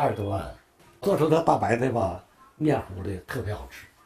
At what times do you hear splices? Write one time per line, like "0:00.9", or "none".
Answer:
0:01.0